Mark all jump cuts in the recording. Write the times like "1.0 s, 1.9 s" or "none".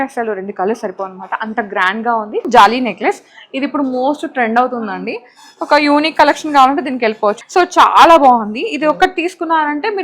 2.5 s, 7.4 s

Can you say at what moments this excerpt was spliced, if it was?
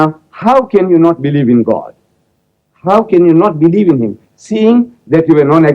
none

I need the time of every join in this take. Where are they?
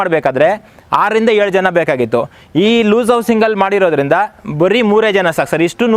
none

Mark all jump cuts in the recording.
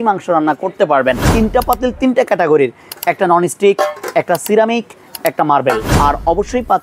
1.3 s, 5.9 s

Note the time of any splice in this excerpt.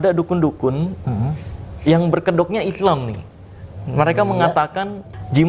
none

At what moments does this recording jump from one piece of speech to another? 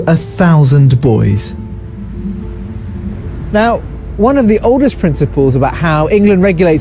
none

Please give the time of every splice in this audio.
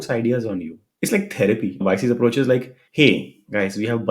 1.8 s

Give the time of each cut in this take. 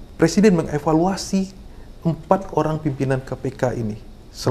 none

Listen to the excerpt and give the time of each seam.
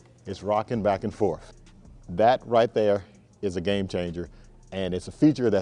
1.5 s

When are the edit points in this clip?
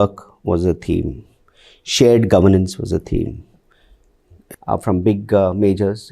4.4 s

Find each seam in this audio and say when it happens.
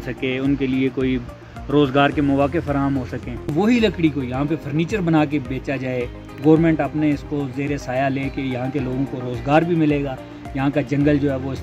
3.5 s

